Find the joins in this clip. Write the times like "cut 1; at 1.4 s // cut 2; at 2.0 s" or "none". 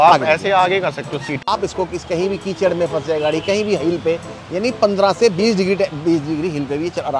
cut 1; at 1.5 s